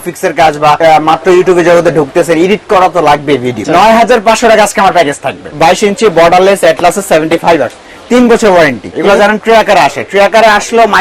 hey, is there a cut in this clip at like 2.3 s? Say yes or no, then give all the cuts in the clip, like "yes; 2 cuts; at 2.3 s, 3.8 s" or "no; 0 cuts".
no; 4 cuts; at 0.8 s, 3.6 s, 5.4 s, 8.9 s